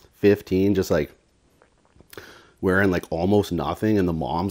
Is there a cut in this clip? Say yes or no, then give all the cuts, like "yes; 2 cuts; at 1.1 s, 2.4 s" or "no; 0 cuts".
no; 0 cuts